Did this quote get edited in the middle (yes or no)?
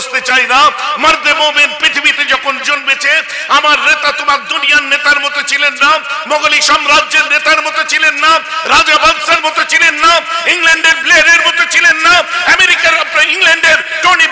no